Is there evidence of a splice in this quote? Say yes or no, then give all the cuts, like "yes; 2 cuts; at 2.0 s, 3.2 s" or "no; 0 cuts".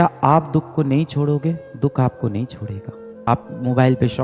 yes; 1 cut; at 3.1 s